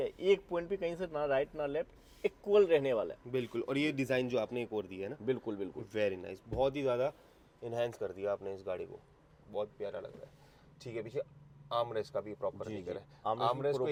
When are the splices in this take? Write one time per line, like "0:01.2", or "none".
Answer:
none

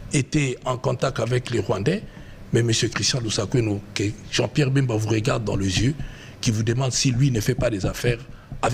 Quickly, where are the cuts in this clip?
none

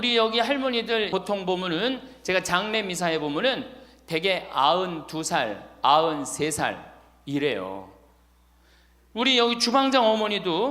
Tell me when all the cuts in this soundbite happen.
0:01.1

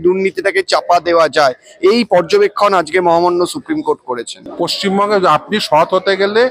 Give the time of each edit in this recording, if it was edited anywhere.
0:04.4

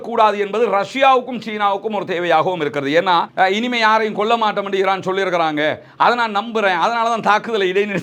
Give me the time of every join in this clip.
0:03.2

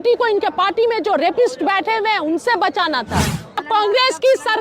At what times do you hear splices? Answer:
0:03.6

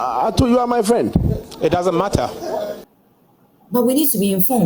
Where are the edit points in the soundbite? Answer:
0:02.9

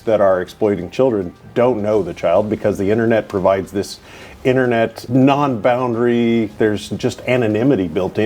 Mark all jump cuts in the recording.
0:05.0
0:06.5

